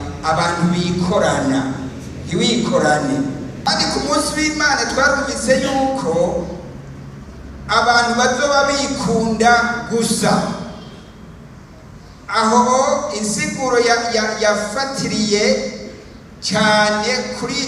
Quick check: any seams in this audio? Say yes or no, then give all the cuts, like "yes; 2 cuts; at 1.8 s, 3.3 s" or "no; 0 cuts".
yes; 1 cut; at 3.7 s